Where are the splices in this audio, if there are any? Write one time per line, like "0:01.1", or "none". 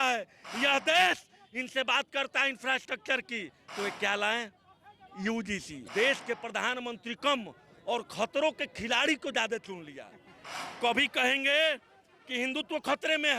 0:05.8